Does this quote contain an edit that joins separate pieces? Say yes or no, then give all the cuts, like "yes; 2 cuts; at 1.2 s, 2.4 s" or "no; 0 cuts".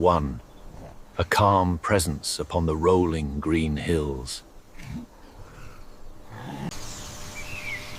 yes; 1 cut; at 6.7 s